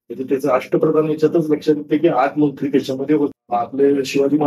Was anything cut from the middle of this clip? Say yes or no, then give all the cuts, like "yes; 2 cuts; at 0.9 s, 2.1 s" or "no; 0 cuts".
yes; 1 cut; at 3.4 s